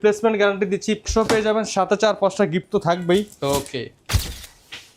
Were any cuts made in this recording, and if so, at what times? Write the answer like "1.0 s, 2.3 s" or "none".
1.0 s, 4.1 s